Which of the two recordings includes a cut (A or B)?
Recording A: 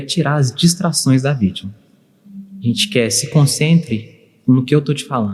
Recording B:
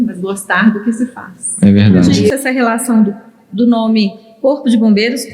B